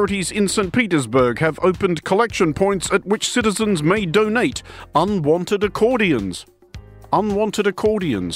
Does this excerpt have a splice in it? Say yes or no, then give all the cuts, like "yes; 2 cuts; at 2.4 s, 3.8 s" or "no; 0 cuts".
no; 0 cuts